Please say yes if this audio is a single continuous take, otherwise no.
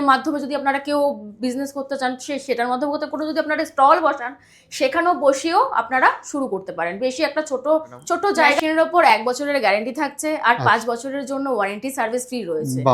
no